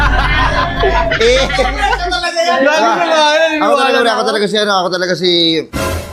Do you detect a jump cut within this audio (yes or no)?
no